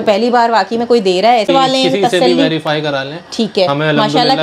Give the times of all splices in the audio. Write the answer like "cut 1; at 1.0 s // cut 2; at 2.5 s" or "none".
cut 1; at 1.5 s